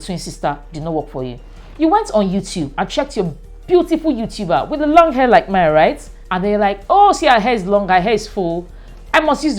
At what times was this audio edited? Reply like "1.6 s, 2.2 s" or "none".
none